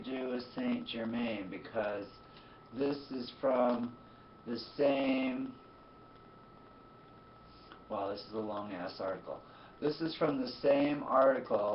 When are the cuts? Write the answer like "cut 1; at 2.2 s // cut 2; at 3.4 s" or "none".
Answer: none